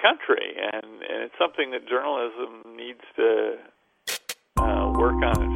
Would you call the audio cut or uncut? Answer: uncut